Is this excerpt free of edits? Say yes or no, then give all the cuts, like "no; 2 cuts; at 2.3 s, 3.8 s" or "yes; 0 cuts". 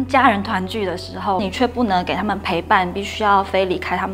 no; 1 cut; at 1.4 s